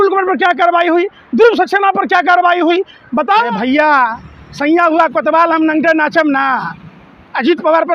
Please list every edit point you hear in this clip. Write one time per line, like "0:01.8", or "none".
0:03.5